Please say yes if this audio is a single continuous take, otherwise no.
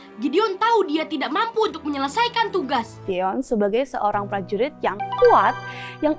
no